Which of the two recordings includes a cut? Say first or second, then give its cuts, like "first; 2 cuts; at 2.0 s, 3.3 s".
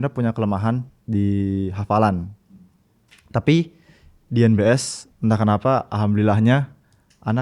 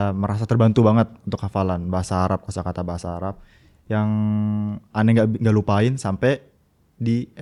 first; 1 cut; at 0.9 s